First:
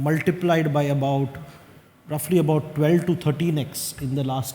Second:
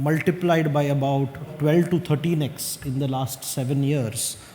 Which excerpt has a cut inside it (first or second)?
second